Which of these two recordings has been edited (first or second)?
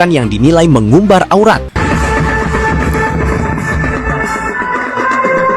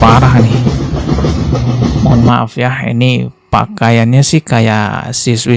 first